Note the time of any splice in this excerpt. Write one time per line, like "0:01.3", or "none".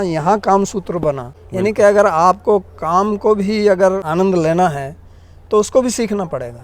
0:01.3
0:04.0